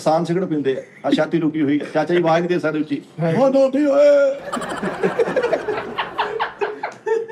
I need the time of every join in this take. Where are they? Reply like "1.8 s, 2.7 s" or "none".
none